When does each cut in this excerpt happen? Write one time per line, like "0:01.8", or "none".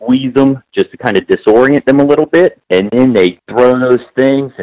0:02.6
0:03.4